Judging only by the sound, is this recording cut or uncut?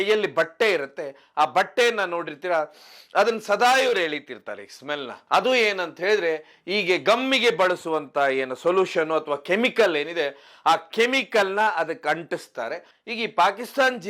cut